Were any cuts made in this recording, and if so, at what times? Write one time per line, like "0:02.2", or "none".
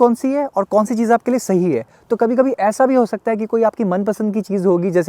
none